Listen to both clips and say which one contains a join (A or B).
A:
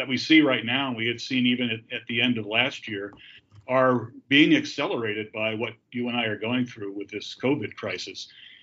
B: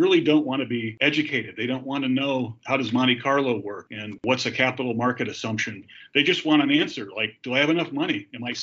B